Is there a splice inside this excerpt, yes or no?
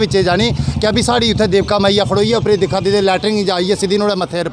no